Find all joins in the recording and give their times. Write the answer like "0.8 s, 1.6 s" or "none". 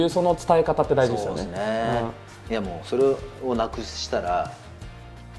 2.3 s